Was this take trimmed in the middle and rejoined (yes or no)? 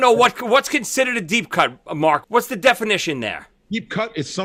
yes